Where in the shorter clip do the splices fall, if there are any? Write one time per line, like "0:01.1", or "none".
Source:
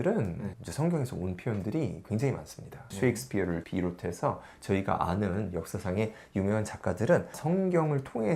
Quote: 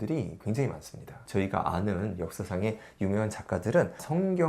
0:01.2